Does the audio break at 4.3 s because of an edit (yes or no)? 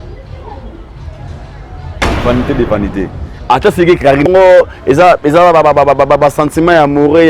yes